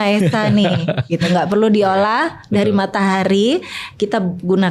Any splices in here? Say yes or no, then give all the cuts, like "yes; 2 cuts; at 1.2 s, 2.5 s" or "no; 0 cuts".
no; 0 cuts